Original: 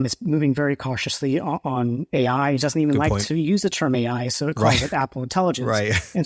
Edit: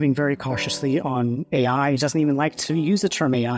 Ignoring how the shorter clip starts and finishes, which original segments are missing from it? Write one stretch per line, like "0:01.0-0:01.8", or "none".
0:01.4-0:01.6